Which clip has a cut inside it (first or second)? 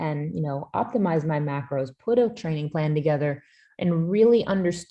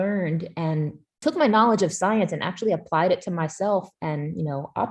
second